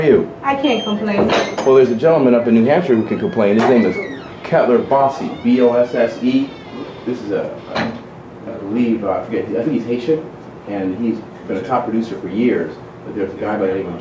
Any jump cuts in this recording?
no; 0 cuts

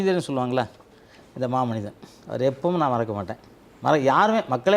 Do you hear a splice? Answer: no; 0 cuts

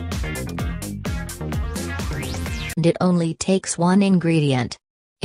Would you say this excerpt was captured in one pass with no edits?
yes; 0 cuts

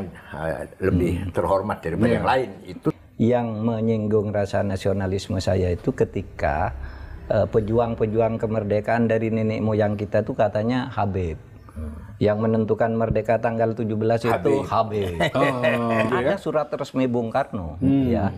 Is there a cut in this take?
yes; 2 cuts; at 3.0 s, 16.1 s

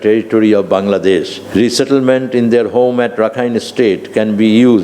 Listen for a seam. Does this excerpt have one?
yes; 1 cut; at 1.4 s

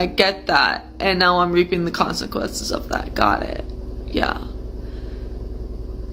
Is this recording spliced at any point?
no; 0 cuts

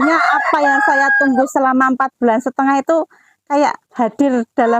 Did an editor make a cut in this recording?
no; 0 cuts

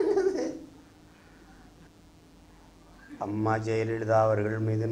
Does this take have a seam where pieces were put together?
yes; 1 cut; at 1.9 s

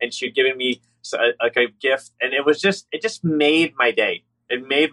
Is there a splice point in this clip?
no; 0 cuts

